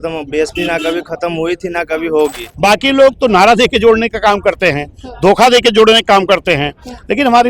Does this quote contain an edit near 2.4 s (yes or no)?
yes